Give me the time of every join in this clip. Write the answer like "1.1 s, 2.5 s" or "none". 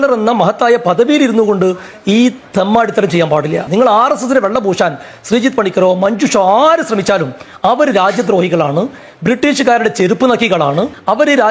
none